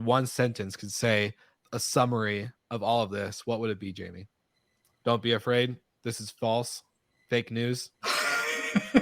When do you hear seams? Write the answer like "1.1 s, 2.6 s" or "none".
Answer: 7.9 s